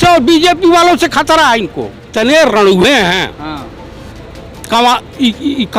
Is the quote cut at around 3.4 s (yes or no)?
no